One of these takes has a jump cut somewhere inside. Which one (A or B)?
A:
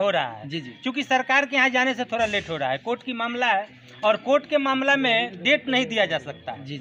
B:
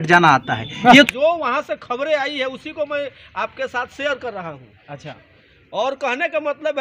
B